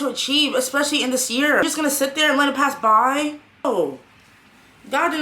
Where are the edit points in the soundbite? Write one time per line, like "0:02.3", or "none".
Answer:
0:01.6
0:03.7